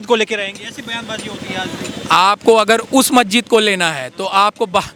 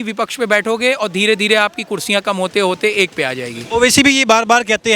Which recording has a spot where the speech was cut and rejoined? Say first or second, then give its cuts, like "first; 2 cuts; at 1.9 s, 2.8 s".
second; 1 cut; at 3.5 s